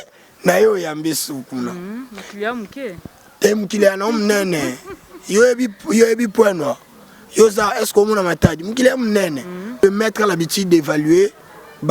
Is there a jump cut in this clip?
yes; 1 cut; at 9.8 s

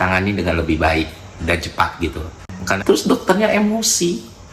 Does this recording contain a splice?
yes; 1 cut; at 2.6 s

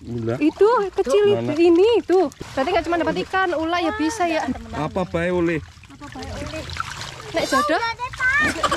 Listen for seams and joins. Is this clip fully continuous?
no; 1 cut; at 2.4 s

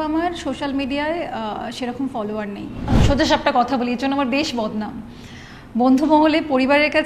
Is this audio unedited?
no; 1 cut; at 3.0 s

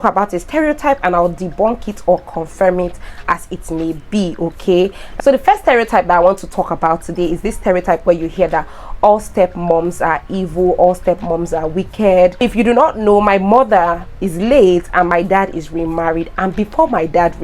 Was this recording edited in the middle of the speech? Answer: yes; 2 cuts; at 5.0 s, 12.4 s

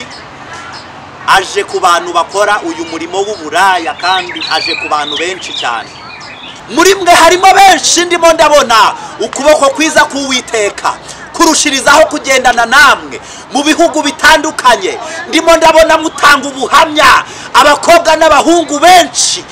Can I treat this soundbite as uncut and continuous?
no; 1 cut; at 6.5 s

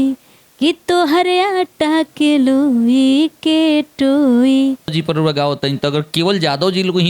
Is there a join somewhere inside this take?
yes; 1 cut; at 4.9 s

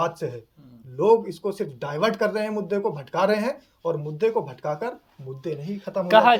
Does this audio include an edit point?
no; 0 cuts

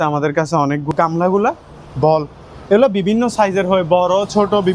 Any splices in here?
yes; 1 cut; at 0.9 s

